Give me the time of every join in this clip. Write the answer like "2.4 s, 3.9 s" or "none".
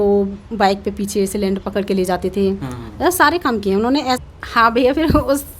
4.2 s